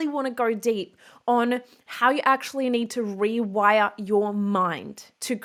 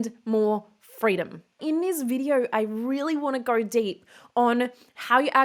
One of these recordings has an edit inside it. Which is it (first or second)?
second